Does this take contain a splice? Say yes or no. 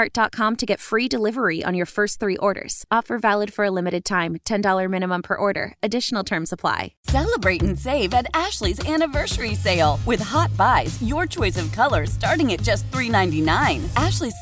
yes